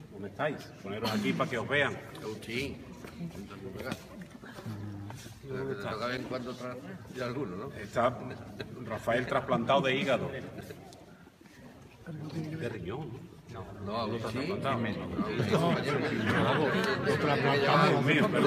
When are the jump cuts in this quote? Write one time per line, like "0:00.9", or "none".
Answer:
none